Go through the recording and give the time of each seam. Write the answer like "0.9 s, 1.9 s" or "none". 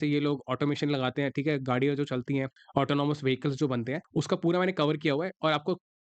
2.6 s, 4.0 s